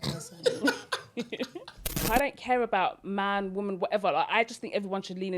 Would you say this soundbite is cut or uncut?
cut